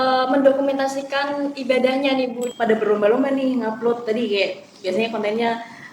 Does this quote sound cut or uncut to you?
cut